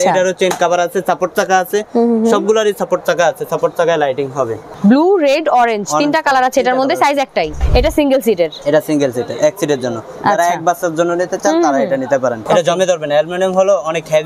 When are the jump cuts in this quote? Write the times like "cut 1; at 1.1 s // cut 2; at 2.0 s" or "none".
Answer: cut 1; at 4.6 s // cut 2; at 7.6 s // cut 3; at 12.4 s